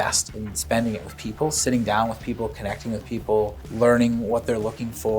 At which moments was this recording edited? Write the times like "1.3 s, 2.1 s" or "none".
3.6 s